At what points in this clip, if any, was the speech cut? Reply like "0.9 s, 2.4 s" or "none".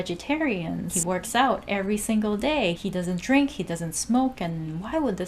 1.0 s, 2.8 s